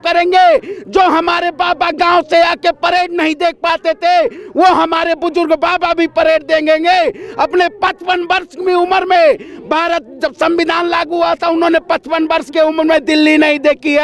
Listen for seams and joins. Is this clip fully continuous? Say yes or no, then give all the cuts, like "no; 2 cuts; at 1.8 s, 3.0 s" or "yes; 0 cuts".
yes; 0 cuts